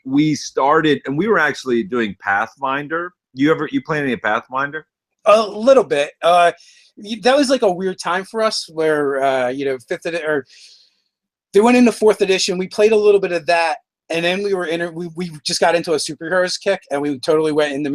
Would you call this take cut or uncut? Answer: cut